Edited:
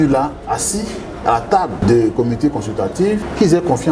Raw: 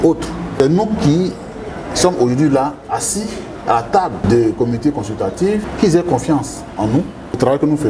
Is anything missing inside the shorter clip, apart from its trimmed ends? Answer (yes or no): no